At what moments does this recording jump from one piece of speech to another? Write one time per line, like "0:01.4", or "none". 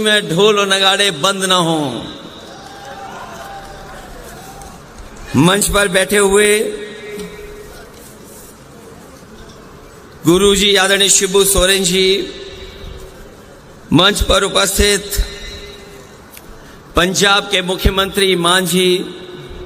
none